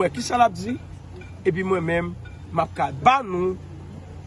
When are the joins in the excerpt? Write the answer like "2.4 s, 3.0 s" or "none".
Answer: none